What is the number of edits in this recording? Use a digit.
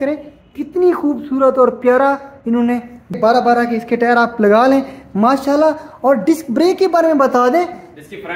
1